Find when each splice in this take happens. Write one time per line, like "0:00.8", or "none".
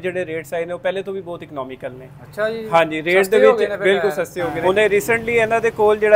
0:04.5